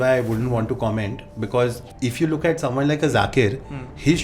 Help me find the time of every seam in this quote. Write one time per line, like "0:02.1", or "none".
0:01.8